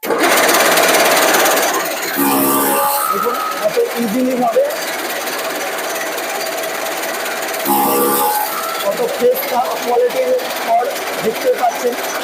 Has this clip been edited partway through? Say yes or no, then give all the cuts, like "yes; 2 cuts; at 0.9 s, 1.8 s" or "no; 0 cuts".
no; 0 cuts